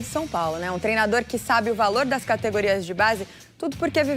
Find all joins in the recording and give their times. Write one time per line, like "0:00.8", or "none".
none